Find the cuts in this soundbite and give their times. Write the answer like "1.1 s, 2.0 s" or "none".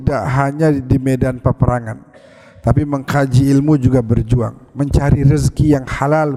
none